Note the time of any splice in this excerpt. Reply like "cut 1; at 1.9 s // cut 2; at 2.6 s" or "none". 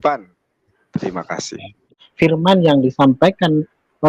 cut 1; at 2.0 s